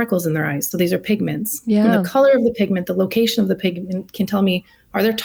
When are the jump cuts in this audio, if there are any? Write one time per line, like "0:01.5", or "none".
none